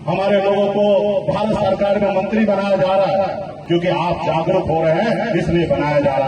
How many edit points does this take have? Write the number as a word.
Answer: one